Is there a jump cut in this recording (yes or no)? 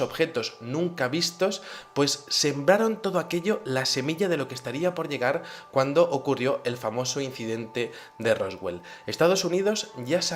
no